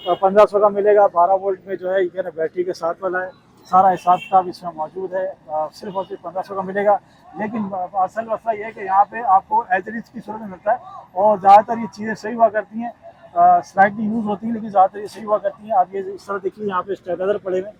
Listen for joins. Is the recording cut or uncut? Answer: uncut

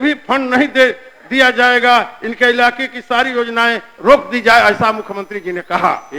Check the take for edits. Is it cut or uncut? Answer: uncut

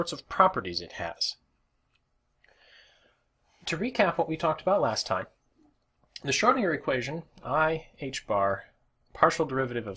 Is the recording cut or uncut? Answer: uncut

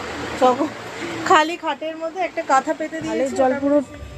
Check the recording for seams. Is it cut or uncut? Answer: cut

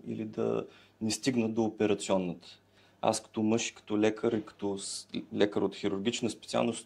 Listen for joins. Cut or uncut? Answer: uncut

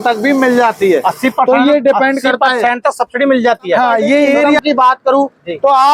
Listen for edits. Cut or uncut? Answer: cut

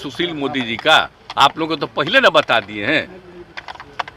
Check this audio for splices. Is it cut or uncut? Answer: uncut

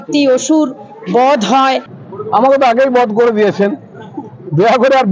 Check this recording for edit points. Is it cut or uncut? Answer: cut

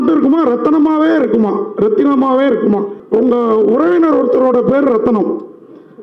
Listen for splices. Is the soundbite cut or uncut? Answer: cut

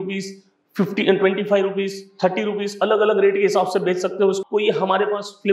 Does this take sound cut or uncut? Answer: cut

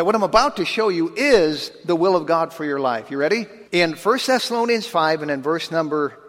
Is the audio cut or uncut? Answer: cut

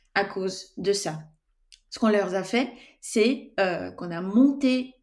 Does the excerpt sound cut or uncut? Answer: uncut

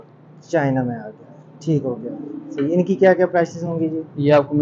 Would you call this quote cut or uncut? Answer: uncut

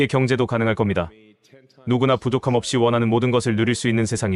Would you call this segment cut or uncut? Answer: uncut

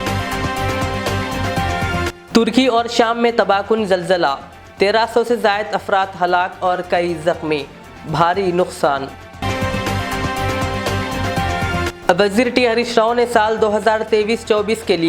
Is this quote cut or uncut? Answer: cut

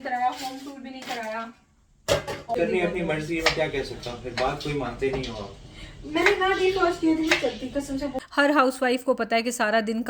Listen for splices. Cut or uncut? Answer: cut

